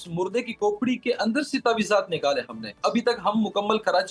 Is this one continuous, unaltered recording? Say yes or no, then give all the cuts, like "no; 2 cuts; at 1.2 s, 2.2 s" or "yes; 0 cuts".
no; 1 cut; at 2.8 s